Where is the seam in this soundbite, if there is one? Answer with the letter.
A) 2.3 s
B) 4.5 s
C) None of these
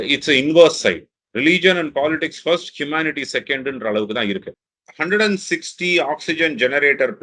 B